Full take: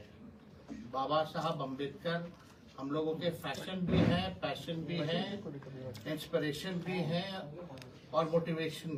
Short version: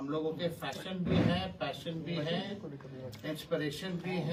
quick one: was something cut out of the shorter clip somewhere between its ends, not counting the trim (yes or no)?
no